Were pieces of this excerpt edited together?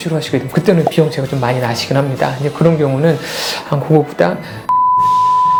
no; 0 cuts

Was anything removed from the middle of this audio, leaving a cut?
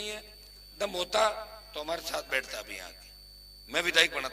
no; 0 cuts

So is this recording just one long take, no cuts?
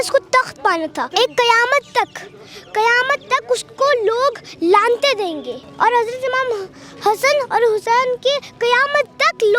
no; 2 cuts; at 1.0 s, 5.6 s

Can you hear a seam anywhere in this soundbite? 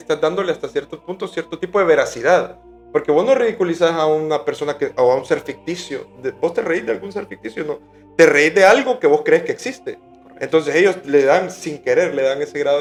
no; 0 cuts

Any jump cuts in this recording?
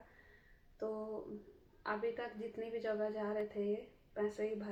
no; 0 cuts

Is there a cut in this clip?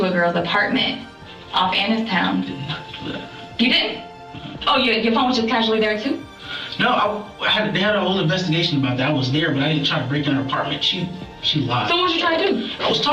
no; 0 cuts

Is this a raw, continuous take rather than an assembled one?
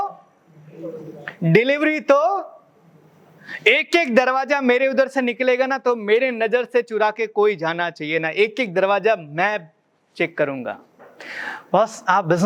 yes; 0 cuts

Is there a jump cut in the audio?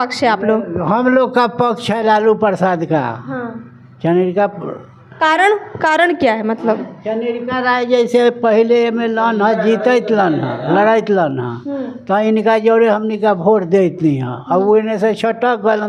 no; 0 cuts

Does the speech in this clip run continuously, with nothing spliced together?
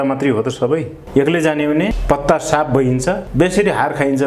no; 1 cut; at 1.0 s

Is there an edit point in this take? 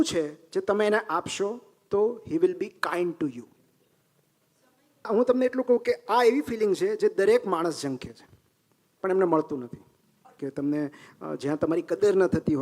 yes; 2 cuts; at 5.1 s, 10.3 s

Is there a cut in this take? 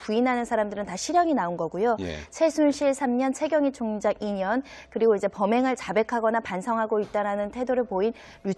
yes; 1 cut; at 2.2 s

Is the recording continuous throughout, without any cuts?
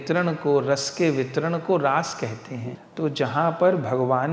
no; 1 cut; at 2.7 s

